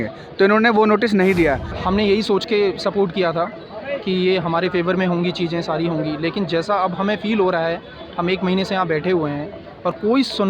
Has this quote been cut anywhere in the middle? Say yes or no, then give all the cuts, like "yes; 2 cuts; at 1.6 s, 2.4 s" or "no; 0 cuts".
yes; 1 cut; at 1.8 s